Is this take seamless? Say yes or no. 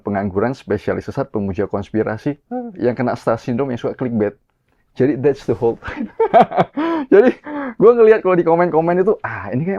yes